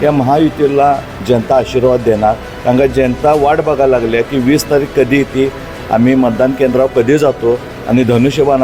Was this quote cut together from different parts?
no; 0 cuts

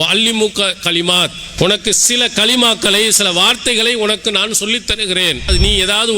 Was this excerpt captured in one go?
no; 2 cuts; at 1.4 s, 5.5 s

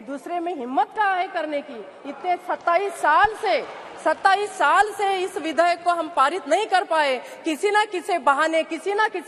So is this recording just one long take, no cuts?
yes; 0 cuts

